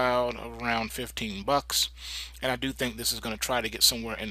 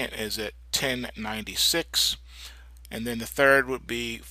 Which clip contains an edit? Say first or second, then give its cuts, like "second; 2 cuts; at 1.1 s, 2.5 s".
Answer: second; 1 cut; at 1.6 s